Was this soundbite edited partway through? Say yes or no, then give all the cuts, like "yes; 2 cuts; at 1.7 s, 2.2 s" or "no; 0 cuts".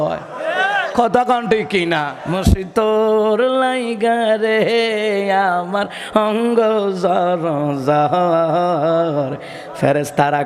yes; 1 cut; at 2.2 s